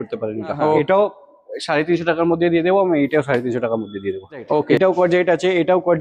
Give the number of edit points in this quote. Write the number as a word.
two